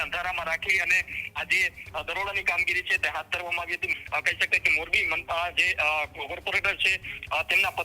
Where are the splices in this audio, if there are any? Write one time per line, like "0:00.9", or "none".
0:03.9